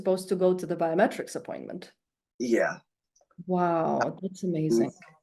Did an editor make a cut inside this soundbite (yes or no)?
no